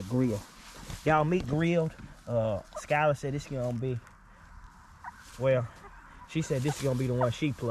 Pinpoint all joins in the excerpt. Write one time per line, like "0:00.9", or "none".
none